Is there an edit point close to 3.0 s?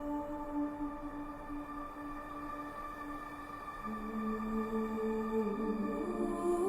no; 1 cut; at 1.4 s

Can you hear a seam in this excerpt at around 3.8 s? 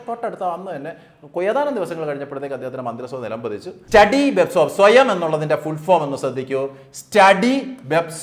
yes; 1 cut; at 3.8 s

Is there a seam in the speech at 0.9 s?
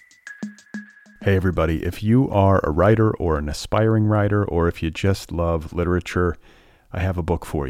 yes; 1 cut; at 0.9 s

